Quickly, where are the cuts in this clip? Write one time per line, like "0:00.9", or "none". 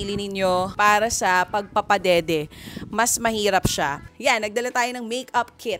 0:04.1